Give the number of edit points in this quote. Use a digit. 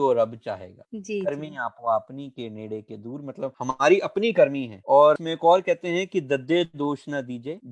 0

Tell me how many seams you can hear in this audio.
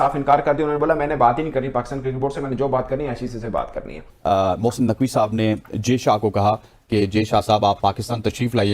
1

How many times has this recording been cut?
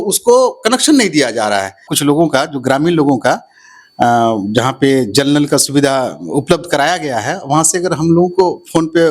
1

